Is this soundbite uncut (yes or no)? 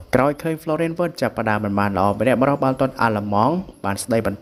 yes